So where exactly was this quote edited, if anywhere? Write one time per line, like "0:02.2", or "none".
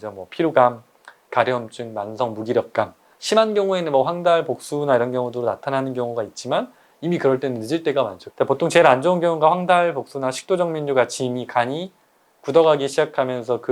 0:08.2